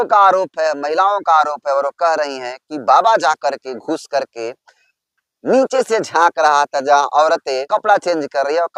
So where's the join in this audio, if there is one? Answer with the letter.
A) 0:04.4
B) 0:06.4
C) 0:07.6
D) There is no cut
C